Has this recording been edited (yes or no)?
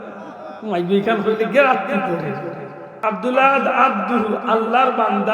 yes